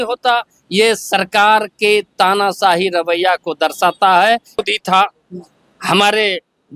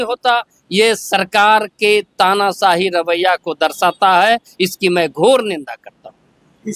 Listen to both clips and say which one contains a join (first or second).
first